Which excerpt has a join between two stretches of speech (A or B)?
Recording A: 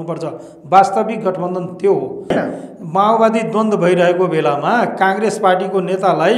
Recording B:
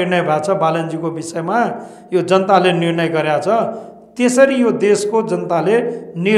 A